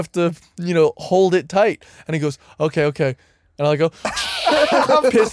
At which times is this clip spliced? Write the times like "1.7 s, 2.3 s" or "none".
none